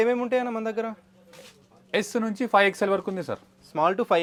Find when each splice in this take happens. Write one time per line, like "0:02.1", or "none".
none